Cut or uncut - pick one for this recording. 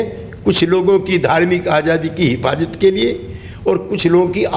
uncut